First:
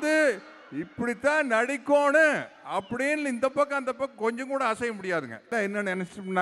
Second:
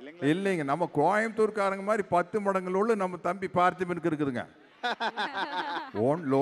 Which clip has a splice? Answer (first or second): first